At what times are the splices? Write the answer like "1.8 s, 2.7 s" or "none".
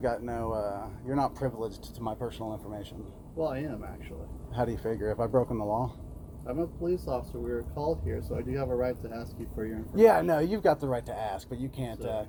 none

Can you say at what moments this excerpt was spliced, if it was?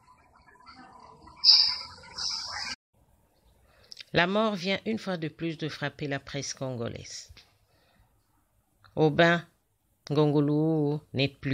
2.7 s

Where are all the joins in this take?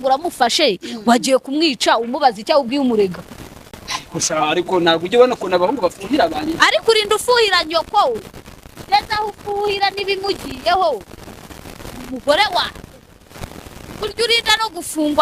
none

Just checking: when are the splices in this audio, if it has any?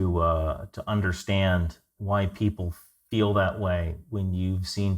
1.9 s

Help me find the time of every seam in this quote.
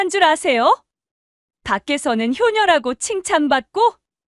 none

